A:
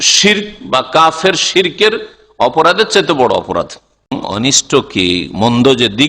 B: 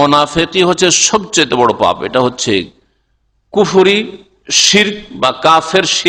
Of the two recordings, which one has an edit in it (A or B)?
A